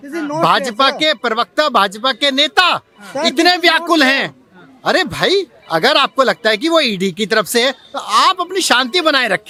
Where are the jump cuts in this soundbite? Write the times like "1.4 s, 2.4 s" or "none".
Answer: none